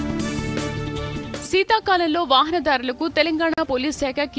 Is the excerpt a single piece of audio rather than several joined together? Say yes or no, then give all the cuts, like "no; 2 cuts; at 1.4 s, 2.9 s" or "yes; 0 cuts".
yes; 0 cuts